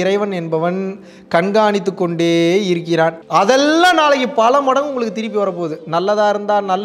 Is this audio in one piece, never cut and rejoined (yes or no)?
no